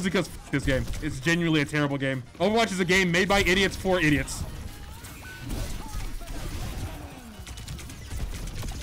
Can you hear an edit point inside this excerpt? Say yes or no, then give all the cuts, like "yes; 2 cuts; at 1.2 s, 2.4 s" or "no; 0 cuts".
yes; 2 cuts; at 2.3 s, 4.7 s